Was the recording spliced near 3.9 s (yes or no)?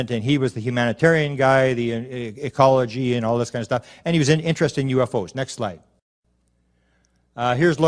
no